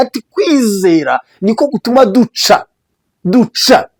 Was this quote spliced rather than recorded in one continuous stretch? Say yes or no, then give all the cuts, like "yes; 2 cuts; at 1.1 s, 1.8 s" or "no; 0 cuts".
no; 0 cuts